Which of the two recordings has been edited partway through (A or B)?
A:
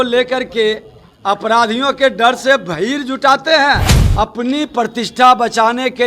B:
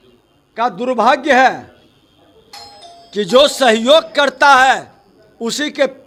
A